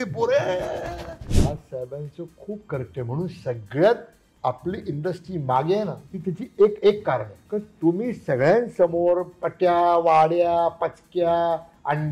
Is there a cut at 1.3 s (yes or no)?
yes